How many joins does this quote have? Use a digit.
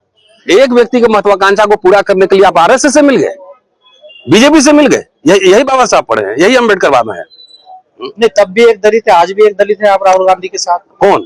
0